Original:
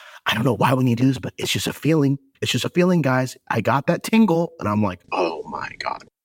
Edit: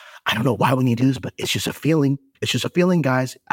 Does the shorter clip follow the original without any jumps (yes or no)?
yes